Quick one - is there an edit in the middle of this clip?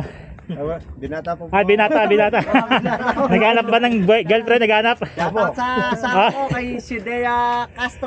no; 0 cuts

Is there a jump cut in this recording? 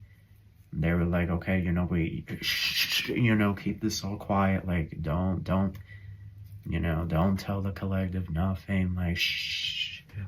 no; 0 cuts

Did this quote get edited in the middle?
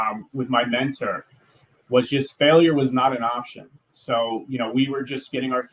no; 0 cuts

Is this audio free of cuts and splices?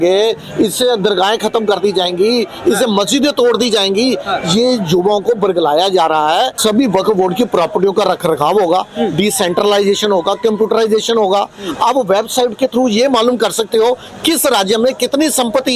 no; 1 cut; at 6.6 s

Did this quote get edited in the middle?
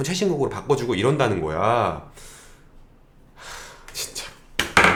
no; 0 cuts

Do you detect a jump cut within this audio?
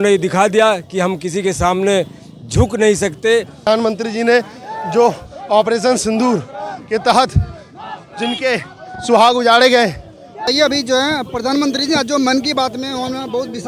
yes; 2 cuts; at 3.6 s, 10.5 s

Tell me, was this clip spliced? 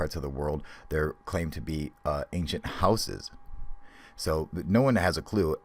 yes; 1 cut; at 1.5 s

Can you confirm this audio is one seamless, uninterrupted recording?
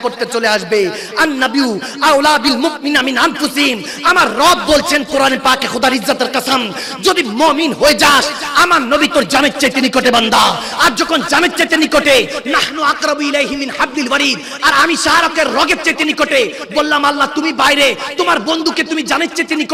yes; 0 cuts

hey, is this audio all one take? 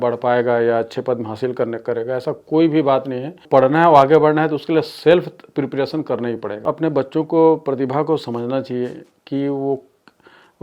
no; 2 cuts; at 3.4 s, 6.6 s

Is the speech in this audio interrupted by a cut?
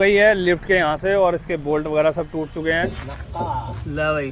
yes; 1 cut; at 2.9 s

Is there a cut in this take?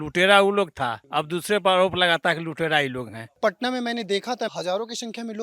yes; 3 cuts; at 1.0 s, 3.3 s, 4.5 s

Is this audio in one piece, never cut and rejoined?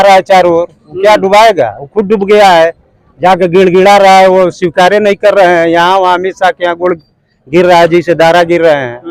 yes; 0 cuts

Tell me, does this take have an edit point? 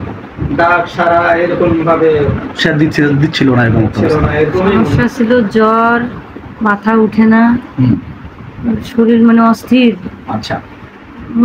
yes; 1 cut; at 4.8 s

